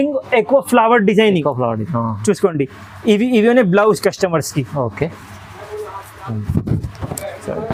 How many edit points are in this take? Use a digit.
0